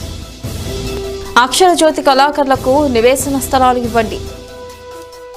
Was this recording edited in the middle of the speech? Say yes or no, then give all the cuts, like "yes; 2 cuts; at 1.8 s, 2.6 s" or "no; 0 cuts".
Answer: yes; 1 cut; at 1.1 s